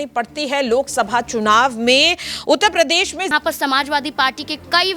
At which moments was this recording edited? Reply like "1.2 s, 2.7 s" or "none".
3.3 s